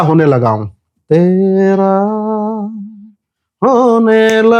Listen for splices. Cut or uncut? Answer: uncut